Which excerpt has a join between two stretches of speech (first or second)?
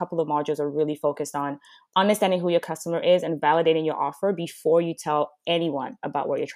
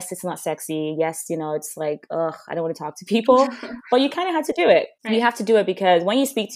second